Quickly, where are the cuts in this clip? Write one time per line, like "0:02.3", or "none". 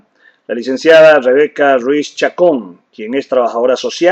0:02.2